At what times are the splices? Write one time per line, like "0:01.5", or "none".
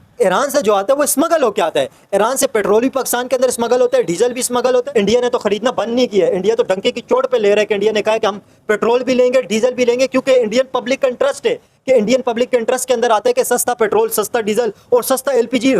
0:04.8